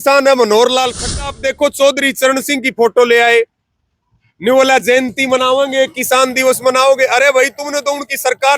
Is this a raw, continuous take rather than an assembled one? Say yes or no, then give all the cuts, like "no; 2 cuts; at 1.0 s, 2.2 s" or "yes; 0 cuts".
no; 1 cut; at 1.2 s